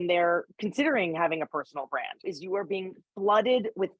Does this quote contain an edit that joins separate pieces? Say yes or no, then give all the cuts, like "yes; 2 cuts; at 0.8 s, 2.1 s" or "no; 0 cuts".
yes; 1 cut; at 2.2 s